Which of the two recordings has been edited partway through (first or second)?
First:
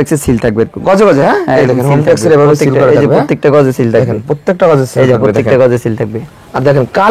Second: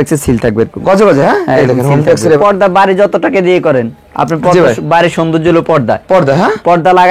second